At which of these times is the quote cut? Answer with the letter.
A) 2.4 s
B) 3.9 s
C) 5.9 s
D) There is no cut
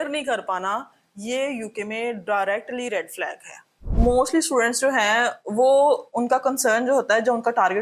B